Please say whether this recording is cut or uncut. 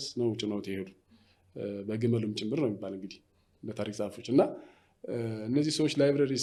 uncut